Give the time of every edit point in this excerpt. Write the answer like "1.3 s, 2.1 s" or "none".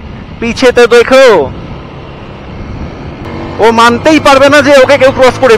3.2 s